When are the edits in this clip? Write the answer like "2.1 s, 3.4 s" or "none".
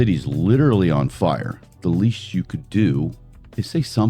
none